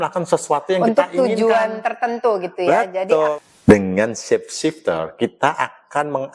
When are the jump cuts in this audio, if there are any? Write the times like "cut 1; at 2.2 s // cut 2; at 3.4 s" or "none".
cut 1; at 3.4 s